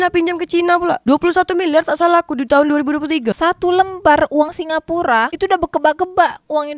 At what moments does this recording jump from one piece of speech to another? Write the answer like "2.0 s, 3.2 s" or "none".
3.3 s